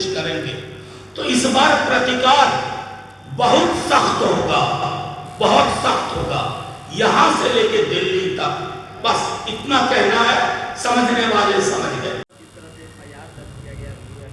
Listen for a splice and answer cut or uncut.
uncut